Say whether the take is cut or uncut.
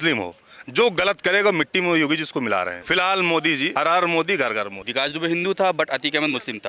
cut